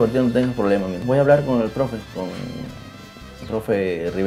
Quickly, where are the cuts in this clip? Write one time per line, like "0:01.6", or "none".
0:01.0